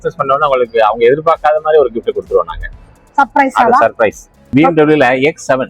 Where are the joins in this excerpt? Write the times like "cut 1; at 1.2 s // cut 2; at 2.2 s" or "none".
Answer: cut 1; at 4.5 s